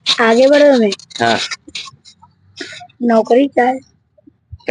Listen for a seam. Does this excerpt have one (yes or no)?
no